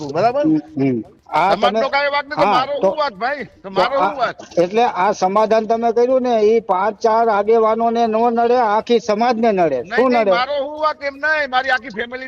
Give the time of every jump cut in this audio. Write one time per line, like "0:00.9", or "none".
0:01.1